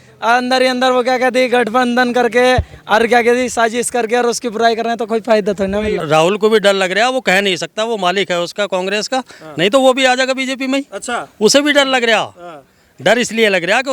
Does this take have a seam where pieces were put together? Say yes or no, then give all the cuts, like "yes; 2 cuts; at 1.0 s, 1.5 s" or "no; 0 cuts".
yes; 1 cut; at 6.0 s